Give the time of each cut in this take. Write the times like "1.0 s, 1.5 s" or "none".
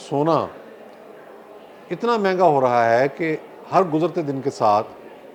none